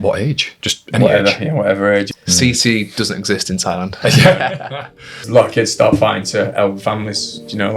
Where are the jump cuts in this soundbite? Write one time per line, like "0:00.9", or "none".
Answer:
0:02.1
0:03.9
0:05.2